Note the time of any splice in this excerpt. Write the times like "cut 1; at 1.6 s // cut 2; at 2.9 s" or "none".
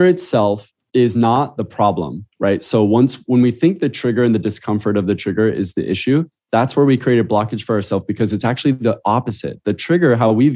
none